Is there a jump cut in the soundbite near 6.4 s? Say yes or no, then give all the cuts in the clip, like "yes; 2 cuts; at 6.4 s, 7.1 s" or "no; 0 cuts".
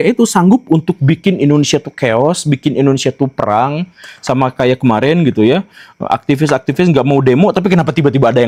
no; 0 cuts